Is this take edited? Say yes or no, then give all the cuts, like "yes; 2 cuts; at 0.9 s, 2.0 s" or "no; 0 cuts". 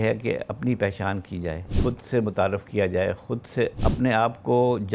yes; 2 cuts; at 1.7 s, 3.8 s